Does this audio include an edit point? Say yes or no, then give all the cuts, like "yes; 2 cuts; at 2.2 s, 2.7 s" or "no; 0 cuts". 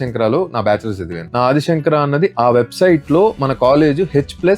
yes; 1 cut; at 1.1 s